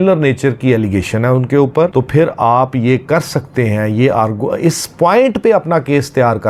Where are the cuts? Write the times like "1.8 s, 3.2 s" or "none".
none